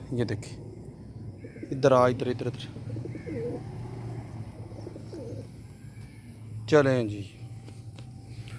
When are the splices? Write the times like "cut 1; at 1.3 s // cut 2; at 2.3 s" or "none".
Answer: none